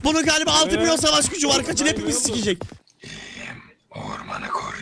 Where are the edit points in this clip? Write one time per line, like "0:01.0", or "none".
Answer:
0:02.8